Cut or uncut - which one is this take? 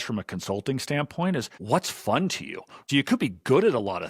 cut